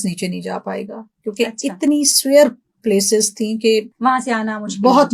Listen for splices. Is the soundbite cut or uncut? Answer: cut